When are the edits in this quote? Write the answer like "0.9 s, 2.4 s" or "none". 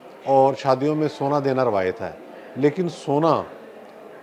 none